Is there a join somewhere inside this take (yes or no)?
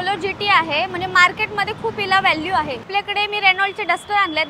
yes